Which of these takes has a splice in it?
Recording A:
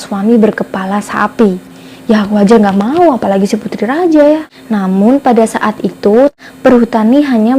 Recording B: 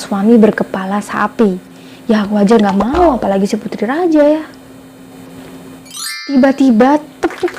A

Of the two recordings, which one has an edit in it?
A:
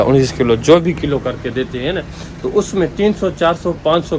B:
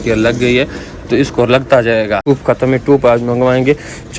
B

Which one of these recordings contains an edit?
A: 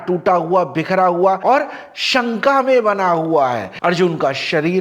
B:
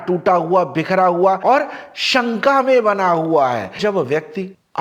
B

